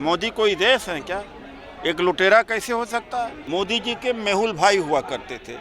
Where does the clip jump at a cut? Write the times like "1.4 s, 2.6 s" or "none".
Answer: 3.4 s